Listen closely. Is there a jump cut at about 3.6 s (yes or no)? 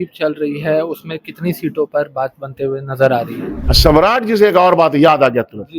yes